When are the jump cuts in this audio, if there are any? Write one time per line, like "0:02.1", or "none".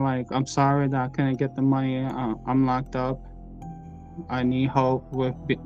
none